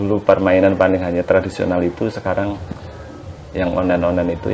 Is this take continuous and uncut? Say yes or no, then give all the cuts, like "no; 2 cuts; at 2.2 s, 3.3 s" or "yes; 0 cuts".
yes; 0 cuts